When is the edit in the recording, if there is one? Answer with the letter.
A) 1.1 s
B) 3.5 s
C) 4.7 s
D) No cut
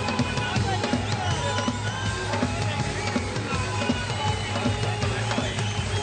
D